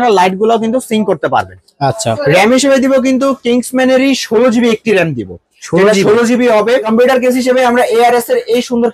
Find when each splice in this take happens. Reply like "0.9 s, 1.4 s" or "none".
2.1 s, 6.9 s